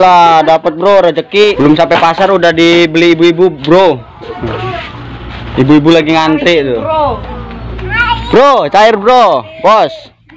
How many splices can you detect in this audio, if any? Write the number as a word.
one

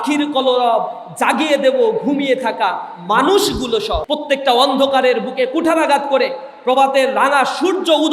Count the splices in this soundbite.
one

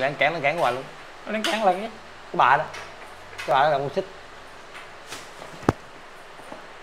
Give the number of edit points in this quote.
zero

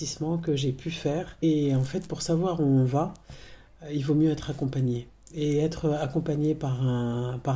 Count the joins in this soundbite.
one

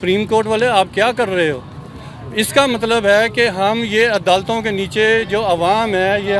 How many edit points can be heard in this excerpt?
zero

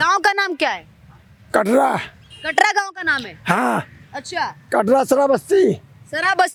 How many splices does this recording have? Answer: zero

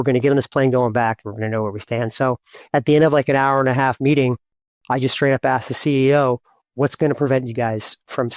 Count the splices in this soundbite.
zero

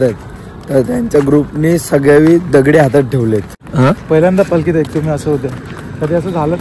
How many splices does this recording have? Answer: one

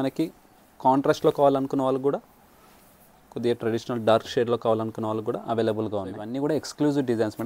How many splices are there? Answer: one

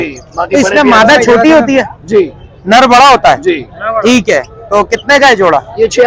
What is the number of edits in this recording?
zero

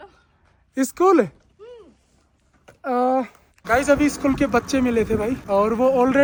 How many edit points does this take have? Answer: zero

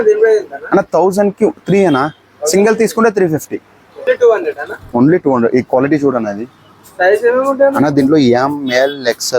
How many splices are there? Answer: one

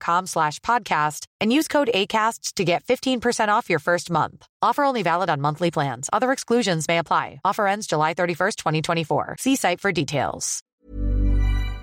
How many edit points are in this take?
one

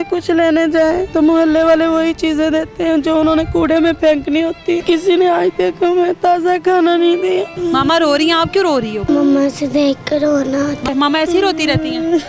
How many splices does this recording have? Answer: five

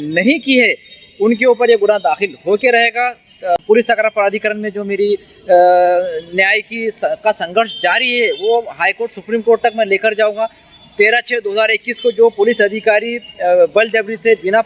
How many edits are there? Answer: zero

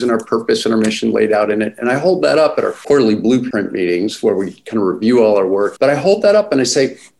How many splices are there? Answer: three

